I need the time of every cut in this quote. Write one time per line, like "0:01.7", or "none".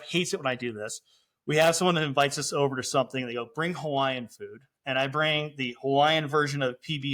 none